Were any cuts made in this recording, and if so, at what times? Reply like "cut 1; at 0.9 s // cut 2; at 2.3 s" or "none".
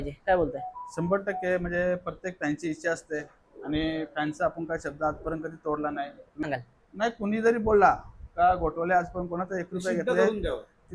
cut 1; at 6.4 s